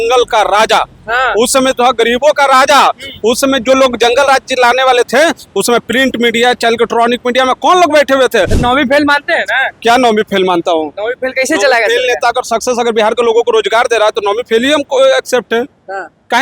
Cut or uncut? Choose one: cut